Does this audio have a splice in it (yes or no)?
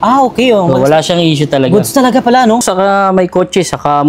yes